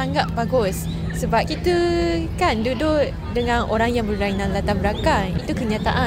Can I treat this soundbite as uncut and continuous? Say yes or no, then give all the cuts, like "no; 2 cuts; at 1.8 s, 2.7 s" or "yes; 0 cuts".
yes; 0 cuts